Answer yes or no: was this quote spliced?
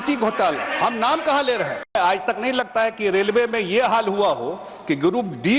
yes